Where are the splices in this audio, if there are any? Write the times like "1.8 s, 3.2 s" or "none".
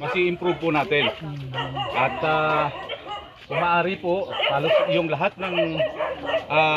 none